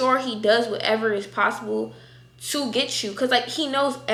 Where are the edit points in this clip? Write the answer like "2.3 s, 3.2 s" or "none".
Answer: none